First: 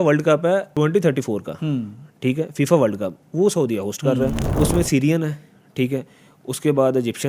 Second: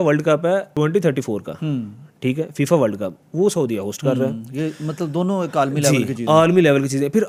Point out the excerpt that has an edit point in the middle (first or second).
first